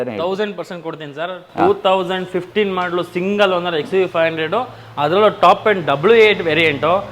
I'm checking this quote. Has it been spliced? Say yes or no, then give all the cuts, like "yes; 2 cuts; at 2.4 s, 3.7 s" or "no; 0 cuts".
no; 0 cuts